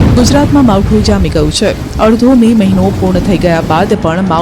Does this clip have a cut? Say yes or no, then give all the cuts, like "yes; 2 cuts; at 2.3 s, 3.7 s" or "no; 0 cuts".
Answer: yes; 1 cut; at 2.2 s